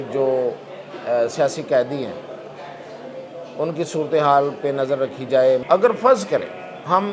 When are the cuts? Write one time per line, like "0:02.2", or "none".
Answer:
0:05.6